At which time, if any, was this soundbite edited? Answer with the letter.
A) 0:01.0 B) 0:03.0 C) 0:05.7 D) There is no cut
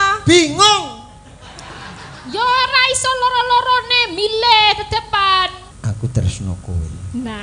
C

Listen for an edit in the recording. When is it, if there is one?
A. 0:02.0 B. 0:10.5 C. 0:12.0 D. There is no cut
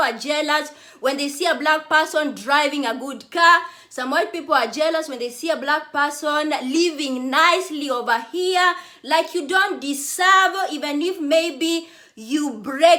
D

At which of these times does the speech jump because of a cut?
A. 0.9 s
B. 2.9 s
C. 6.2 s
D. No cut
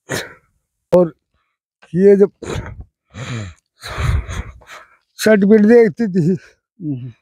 A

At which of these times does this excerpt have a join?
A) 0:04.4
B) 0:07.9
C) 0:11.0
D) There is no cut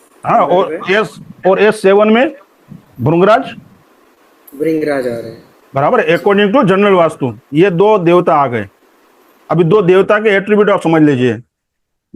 D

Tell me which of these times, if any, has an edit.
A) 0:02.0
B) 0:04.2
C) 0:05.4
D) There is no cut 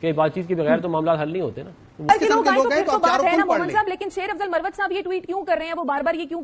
A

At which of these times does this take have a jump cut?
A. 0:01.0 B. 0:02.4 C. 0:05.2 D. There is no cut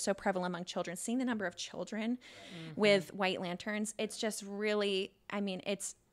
D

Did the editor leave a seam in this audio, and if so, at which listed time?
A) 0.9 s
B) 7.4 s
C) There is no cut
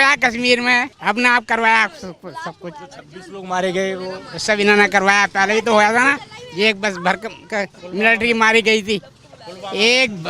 A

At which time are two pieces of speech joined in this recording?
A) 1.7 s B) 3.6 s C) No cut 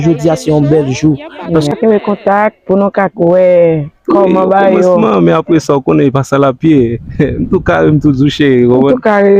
A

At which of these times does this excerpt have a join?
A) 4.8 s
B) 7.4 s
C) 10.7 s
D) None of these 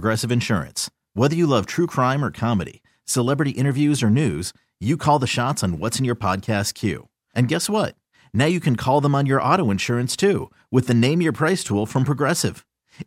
D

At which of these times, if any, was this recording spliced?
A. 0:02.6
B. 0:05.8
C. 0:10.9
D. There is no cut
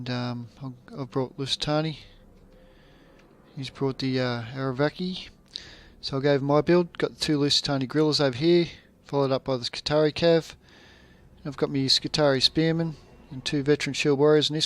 A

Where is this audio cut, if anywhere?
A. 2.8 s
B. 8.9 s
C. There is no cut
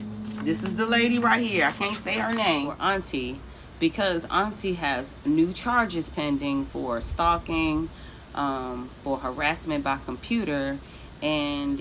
A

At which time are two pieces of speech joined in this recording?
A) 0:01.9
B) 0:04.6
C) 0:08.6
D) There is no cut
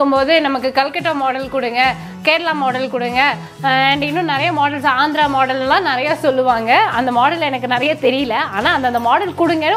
D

